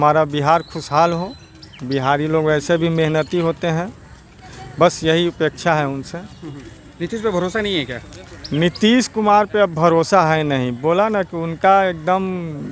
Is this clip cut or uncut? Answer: uncut